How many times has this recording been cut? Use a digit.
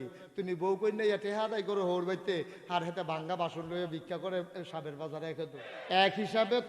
1